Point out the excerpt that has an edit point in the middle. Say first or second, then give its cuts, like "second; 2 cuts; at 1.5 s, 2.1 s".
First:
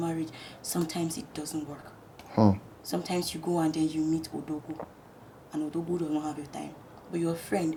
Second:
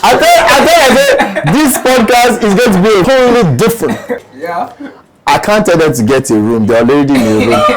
second; 2 cuts; at 3.0 s, 4.2 s